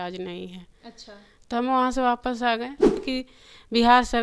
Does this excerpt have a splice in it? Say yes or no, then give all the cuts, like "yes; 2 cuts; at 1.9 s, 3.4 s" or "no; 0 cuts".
yes; 1 cut; at 3.0 s